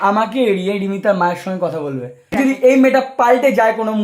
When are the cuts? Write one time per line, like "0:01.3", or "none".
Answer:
0:02.3

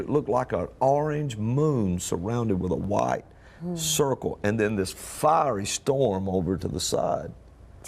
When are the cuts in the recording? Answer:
0:04.7

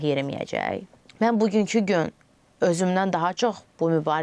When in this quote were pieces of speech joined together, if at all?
0:01.0

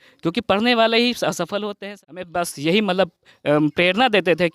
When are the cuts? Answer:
0:01.8

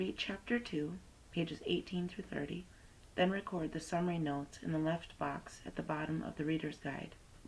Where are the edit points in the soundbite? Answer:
none

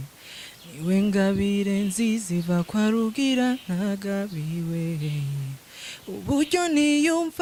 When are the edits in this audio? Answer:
none

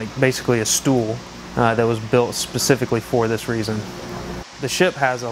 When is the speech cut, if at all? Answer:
0:03.5

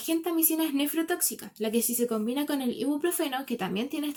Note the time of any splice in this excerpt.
none

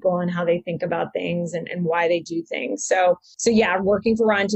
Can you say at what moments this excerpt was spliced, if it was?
0:03.3

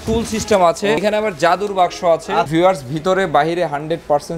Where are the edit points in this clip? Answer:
0:01.0
0:02.5

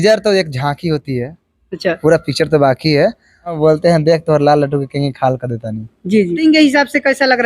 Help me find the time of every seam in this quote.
0:03.6
0:06.4

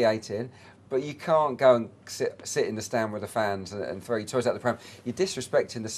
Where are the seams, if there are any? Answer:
none

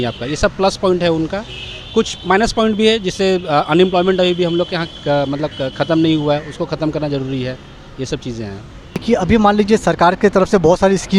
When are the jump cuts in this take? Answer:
0:09.0

